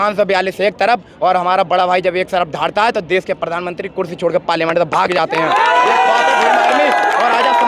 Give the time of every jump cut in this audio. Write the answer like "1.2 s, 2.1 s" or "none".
none